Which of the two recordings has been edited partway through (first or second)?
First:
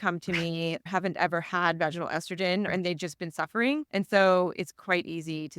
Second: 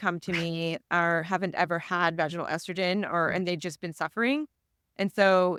first